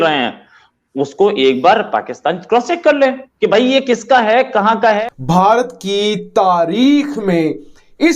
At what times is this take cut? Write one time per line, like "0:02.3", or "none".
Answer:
0:05.0